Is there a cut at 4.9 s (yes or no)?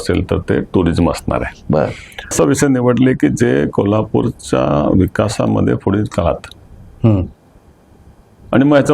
no